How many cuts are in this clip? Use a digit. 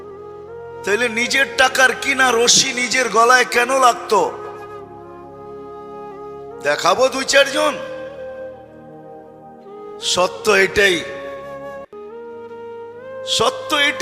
3